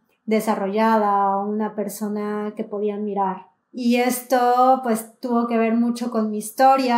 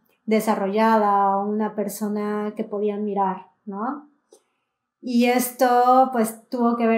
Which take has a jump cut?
first; 1 cut; at 3.5 s

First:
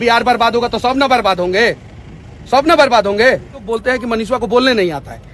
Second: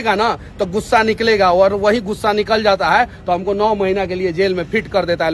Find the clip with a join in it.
first; 1 cut; at 3.7 s

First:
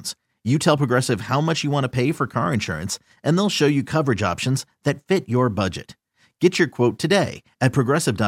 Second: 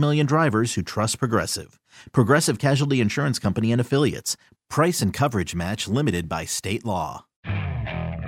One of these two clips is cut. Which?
second; 1 cut; at 7.4 s

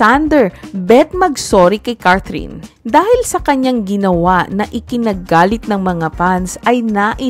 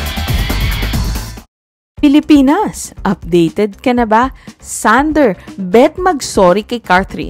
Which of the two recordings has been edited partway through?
second; 1 cut; at 1.4 s

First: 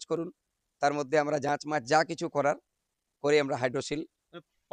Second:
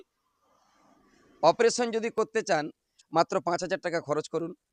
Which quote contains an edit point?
second; 1 cut; at 2.9 s

